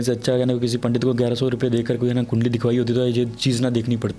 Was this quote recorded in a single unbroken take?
yes; 0 cuts

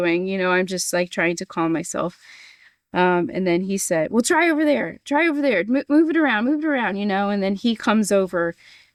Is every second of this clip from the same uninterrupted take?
yes; 0 cuts

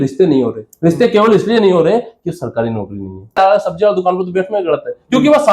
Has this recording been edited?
yes; 1 cut; at 3.4 s

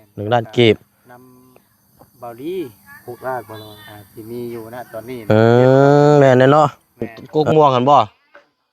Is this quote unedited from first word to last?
no; 1 cut; at 7.2 s

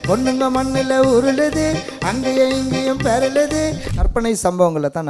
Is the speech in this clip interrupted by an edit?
yes; 1 cut; at 4.0 s

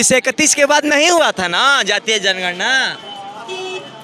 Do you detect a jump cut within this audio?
no; 0 cuts

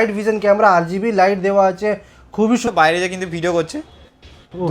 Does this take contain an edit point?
yes; 1 cut; at 2.6 s

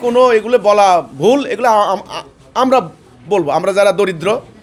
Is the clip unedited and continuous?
yes; 0 cuts

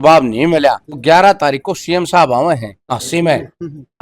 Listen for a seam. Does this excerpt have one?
yes; 2 cuts; at 0.9 s, 2.7 s

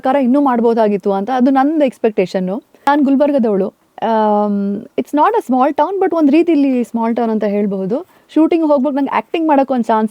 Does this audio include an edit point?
yes; 2 cuts; at 2.7 s, 8.2 s

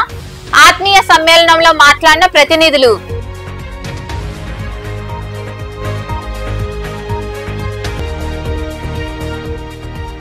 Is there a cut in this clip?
no; 0 cuts

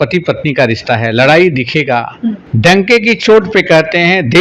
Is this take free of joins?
no; 1 cut; at 2.5 s

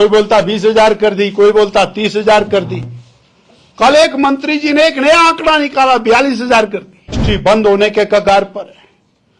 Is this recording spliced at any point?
yes; 1 cut; at 7.2 s

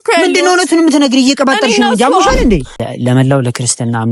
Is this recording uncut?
no; 1 cut; at 2.7 s

